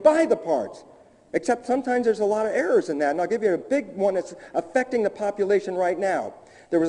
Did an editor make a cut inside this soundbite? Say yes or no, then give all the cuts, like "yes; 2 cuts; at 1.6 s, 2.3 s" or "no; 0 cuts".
yes; 1 cut; at 1.3 s